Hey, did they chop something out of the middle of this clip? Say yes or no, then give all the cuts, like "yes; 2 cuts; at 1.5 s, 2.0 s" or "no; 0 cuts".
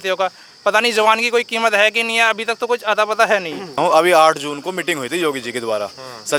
no; 0 cuts